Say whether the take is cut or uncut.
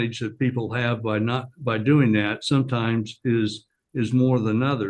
uncut